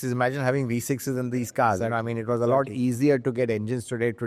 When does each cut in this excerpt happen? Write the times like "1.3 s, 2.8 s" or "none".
none

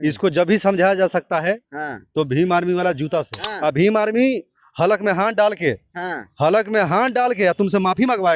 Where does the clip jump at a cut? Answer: 3.4 s

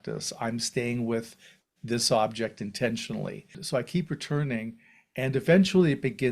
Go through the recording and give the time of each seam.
3.6 s

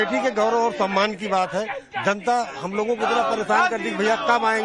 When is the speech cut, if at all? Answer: none

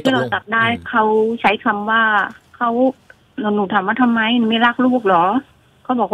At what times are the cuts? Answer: none

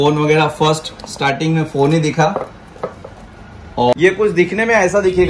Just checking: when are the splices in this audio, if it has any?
3.9 s

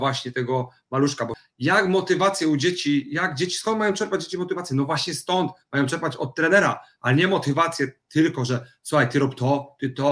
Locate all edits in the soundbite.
1.3 s

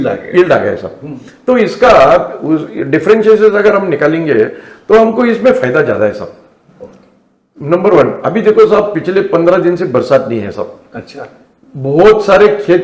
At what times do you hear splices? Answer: none

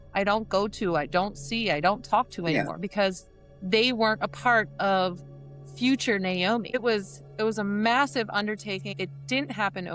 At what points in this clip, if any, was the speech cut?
6.8 s, 8.9 s

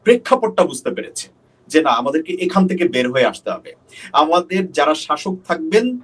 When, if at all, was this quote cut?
none

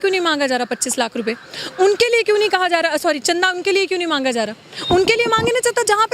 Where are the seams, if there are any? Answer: none

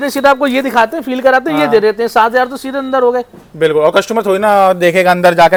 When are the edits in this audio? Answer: none

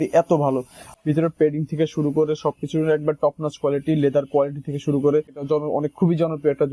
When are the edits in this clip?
0.9 s, 5.4 s

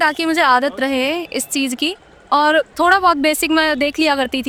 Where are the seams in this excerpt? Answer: none

